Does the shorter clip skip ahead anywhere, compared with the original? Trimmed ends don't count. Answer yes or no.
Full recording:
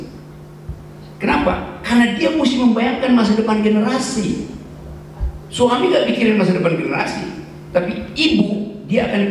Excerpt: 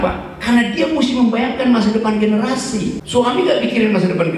yes